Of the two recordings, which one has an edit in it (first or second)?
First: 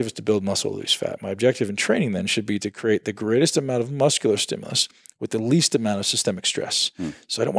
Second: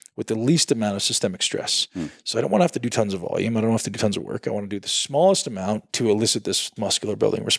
second